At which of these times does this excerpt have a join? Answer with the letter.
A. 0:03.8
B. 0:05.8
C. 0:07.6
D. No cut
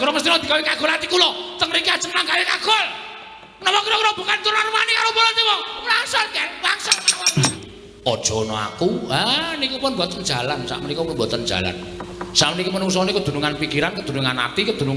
C